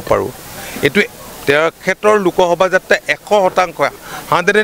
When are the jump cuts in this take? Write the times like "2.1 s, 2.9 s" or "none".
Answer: none